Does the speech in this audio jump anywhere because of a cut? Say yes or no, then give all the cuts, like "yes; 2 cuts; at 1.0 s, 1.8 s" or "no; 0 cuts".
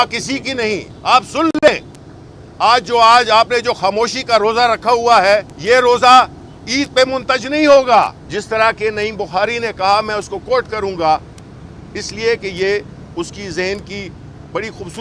yes; 3 cuts; at 0.9 s, 5.5 s, 8.2 s